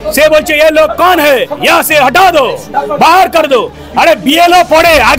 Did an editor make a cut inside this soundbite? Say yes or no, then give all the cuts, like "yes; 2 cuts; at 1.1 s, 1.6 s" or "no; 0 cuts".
no; 0 cuts